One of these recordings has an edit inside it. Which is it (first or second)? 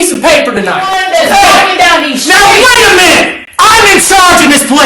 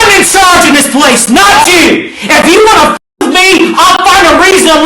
first